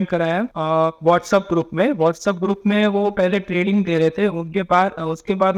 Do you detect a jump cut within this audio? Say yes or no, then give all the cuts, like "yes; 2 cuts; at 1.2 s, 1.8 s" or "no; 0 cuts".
no; 0 cuts